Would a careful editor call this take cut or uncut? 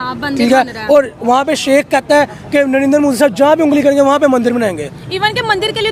uncut